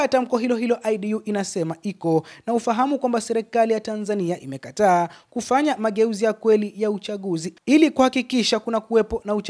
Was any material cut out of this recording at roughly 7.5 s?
yes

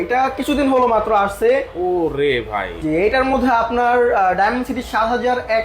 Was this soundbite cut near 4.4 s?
no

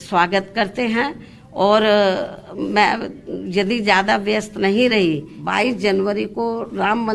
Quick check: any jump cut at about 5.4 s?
yes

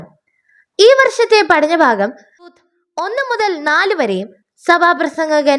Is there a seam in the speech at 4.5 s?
no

